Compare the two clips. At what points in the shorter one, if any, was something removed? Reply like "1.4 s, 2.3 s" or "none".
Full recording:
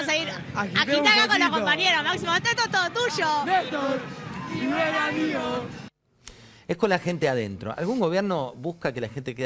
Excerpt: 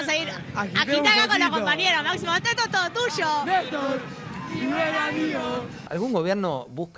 5.8 s

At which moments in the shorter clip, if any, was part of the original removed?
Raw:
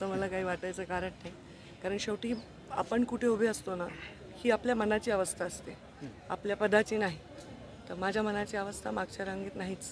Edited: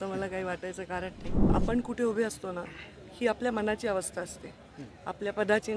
1.3 s

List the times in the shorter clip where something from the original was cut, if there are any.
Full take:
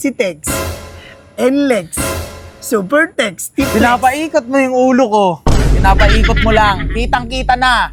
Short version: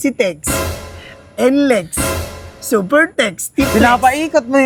none

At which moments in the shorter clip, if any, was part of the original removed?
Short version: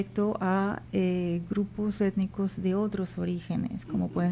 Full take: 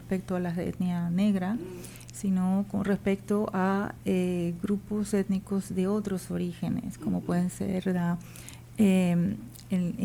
none

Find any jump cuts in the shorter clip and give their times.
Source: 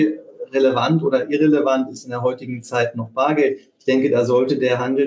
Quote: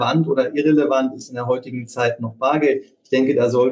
none

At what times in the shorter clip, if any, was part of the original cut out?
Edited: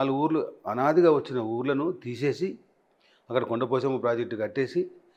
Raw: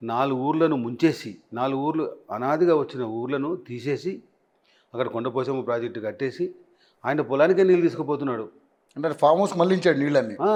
none

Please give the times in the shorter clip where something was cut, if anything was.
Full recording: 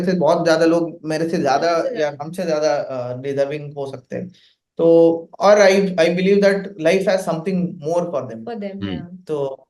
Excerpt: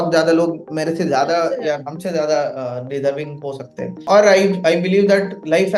3.9 s

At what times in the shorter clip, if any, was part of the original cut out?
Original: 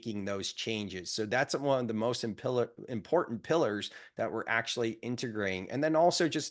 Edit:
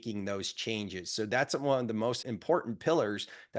2.2 s

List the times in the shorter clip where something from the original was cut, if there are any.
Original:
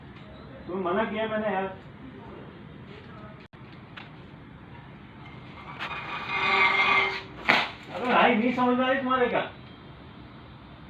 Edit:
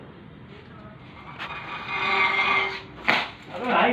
1.0 s

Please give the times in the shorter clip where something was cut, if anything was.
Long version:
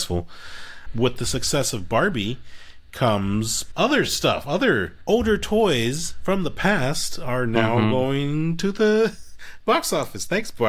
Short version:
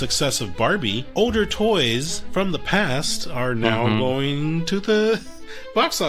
1.0 s

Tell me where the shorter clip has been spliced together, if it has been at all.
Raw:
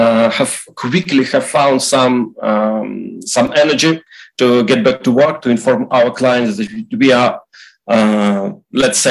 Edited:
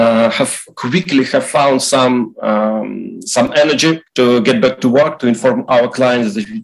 4.1 s

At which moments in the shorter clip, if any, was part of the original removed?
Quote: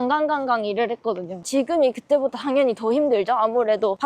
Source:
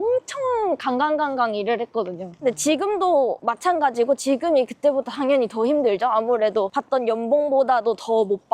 1.5 s

